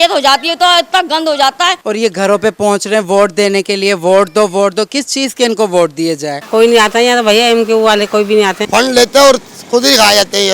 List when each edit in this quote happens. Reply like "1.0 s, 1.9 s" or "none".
1.8 s, 6.4 s, 8.6 s